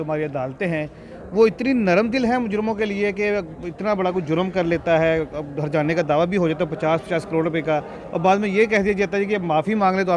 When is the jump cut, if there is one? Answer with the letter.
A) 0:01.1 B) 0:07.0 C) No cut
C